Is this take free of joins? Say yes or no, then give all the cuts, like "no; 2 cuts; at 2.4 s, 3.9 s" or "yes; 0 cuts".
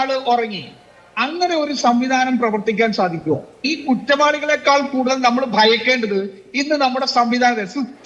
no; 1 cut; at 3.6 s